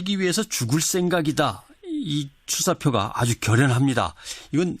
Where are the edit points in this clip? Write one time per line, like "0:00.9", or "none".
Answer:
0:02.9